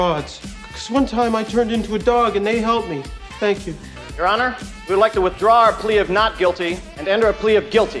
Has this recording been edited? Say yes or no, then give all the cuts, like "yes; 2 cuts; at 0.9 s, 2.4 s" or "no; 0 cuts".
no; 0 cuts